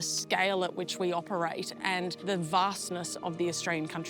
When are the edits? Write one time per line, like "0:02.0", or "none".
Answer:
none